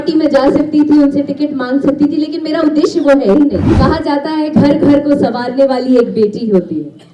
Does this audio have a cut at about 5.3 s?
no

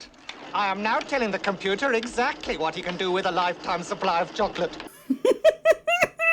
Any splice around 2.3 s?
no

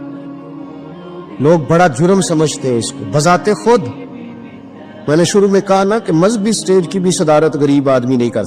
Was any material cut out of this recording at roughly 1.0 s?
yes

